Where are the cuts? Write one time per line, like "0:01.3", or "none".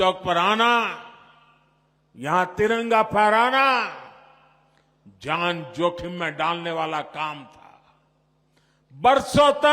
none